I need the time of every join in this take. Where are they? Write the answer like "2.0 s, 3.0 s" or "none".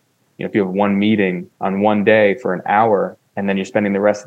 1.5 s, 3.2 s

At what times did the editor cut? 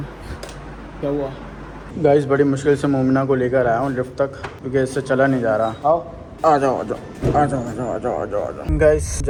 none

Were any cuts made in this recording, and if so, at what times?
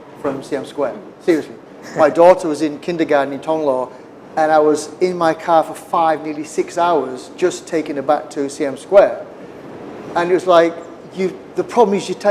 none

